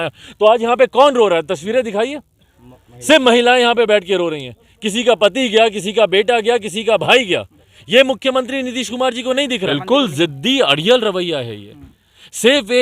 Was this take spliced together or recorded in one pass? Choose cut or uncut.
cut